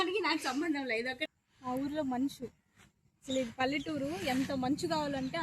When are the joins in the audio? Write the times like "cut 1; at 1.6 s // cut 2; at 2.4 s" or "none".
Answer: cut 1; at 1.2 s

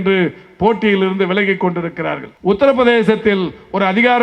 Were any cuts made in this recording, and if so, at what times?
cut 1; at 2.2 s

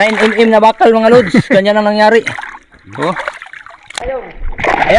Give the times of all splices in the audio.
cut 1; at 4.0 s

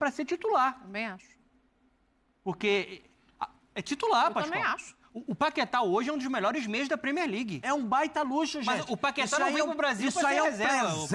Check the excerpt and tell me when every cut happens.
cut 1; at 7.6 s

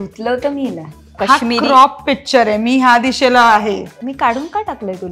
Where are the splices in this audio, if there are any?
cut 1; at 1.1 s // cut 2; at 3.9 s

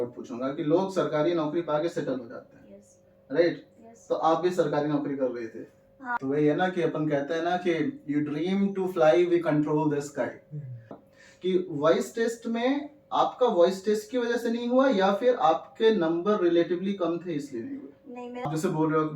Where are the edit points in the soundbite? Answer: cut 1; at 6.0 s // cut 2; at 10.9 s // cut 3; at 18.5 s

